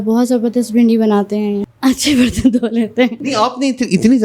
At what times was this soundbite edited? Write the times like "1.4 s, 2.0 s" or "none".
1.6 s, 3.2 s